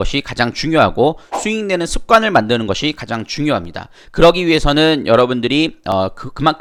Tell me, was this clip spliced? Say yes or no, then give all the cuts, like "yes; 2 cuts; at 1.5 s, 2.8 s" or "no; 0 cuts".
no; 0 cuts